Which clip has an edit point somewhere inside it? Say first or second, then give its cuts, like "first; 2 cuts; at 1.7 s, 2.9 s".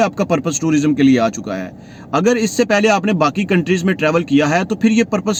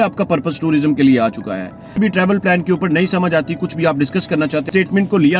second; 2 cuts; at 2.0 s, 4.6 s